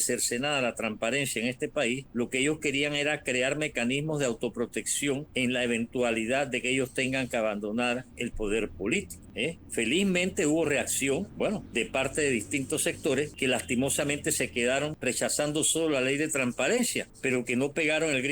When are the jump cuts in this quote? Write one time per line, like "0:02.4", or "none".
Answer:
0:02.0
0:05.3
0:09.2
0:11.4
0:13.3
0:15.0
0:17.1

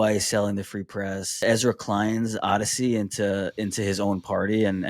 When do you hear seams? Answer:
0:01.4

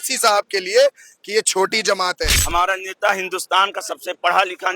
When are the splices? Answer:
0:02.4

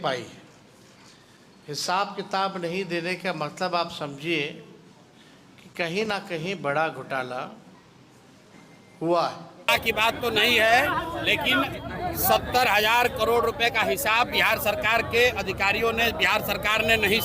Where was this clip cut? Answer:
0:09.7

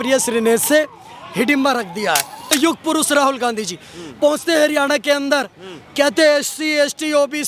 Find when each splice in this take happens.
0:02.5

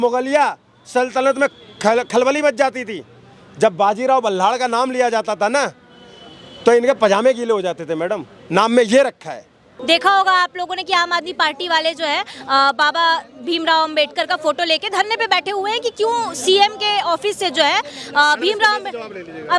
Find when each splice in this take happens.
none

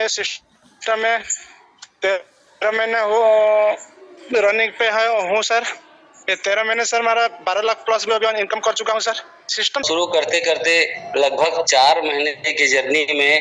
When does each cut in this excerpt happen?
0:09.8

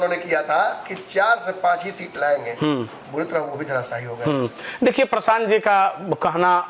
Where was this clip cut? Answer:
none

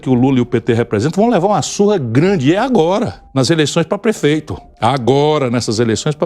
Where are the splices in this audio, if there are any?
0:03.2
0:04.6

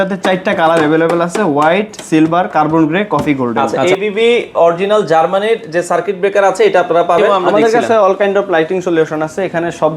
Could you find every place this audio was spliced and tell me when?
0:03.7
0:07.4

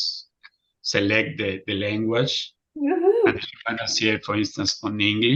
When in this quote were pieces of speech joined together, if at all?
none

